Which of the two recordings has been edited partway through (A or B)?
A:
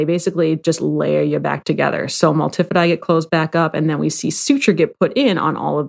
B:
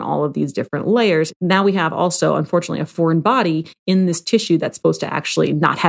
B